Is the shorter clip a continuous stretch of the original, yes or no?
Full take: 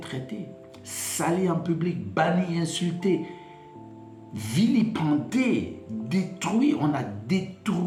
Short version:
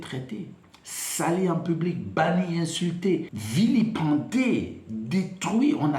no